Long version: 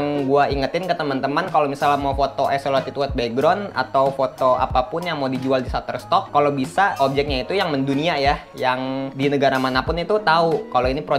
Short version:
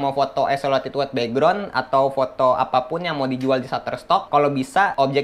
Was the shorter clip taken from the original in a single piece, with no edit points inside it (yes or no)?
yes